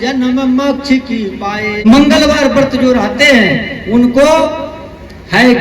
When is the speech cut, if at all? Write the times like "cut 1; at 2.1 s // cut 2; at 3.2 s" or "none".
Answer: cut 1; at 1.8 s